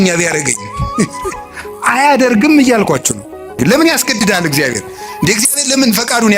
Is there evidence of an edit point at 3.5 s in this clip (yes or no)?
yes